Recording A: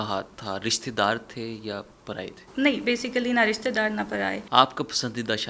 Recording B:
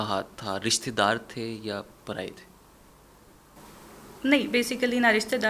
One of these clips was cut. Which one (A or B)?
A